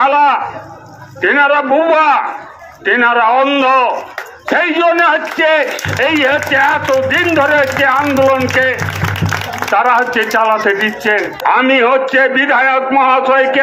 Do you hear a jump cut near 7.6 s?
no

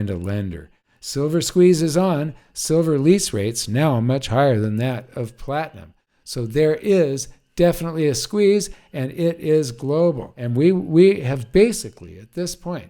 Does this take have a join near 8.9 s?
no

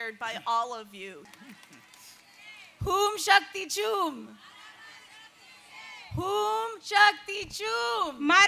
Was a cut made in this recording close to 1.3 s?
yes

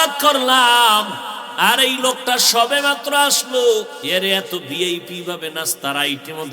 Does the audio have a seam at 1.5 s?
no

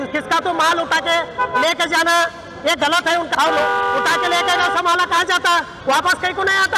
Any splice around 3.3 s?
yes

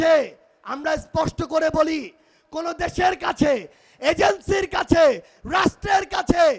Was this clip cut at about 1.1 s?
no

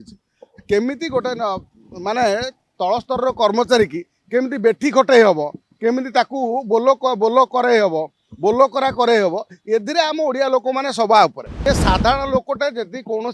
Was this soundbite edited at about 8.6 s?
no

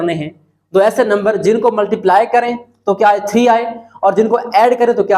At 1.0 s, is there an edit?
no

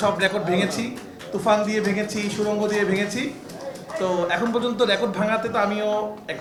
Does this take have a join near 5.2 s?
no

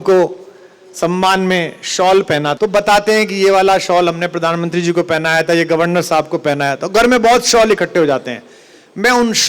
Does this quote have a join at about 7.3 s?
no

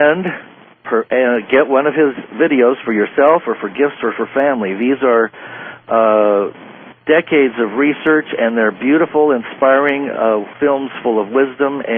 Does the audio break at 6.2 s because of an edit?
no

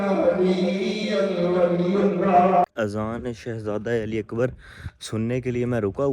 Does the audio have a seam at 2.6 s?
yes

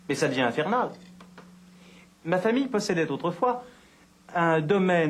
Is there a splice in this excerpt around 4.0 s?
no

